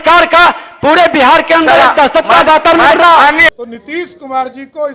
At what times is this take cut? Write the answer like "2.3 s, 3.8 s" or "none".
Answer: 3.5 s